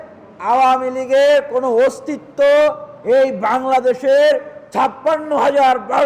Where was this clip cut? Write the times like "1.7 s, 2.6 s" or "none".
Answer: none